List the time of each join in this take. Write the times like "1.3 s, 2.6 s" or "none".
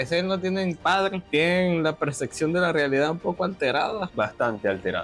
1.2 s, 4.1 s

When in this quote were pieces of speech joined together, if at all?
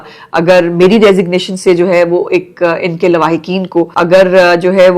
3.9 s

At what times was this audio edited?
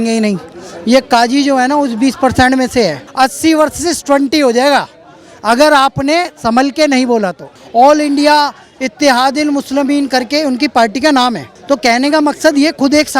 3.0 s, 7.5 s, 11.5 s

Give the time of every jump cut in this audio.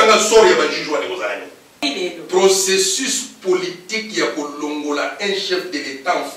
1.9 s

